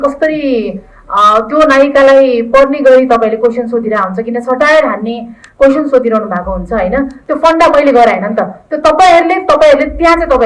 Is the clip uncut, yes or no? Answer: no